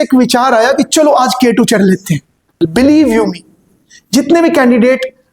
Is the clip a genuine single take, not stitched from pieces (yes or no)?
no